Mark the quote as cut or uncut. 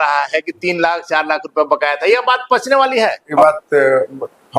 cut